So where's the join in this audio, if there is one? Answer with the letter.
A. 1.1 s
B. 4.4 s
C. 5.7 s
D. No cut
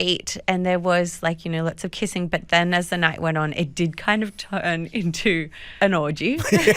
C